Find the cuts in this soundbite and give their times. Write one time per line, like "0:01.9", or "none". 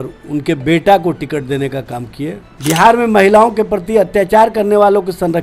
0:02.5